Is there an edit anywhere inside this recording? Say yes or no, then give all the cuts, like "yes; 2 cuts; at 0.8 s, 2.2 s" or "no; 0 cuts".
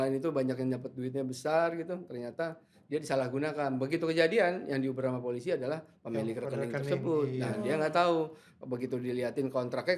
no; 0 cuts